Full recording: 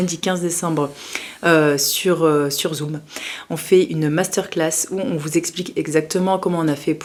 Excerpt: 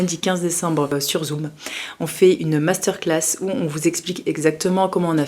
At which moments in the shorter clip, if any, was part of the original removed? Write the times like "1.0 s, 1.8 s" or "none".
1.0 s

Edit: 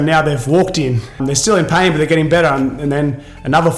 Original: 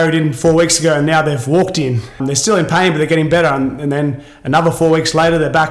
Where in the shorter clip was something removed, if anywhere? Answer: none

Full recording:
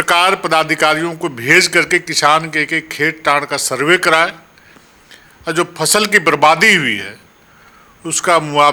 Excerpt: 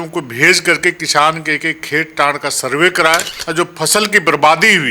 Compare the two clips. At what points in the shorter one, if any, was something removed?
3.3 s

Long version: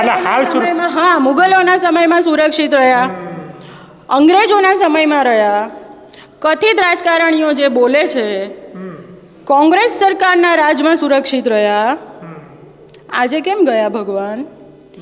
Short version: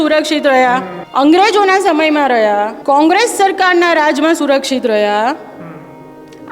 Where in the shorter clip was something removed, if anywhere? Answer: 1.0 s, 2.8 s

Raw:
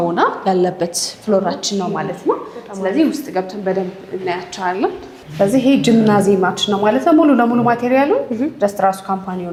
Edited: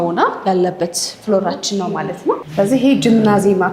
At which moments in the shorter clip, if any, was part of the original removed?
2.5 s

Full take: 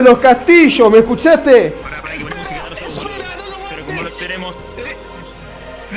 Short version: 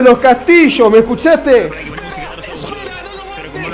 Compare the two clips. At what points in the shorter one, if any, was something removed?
1.8 s

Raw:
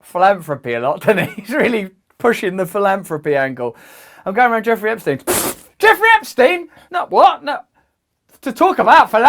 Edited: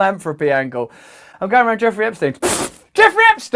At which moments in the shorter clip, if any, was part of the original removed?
none

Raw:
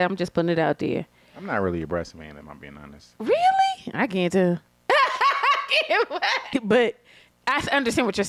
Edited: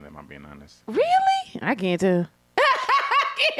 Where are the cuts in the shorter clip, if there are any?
none

